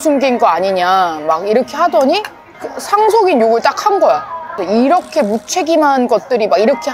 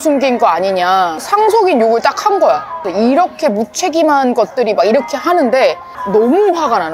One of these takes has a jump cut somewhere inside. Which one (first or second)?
second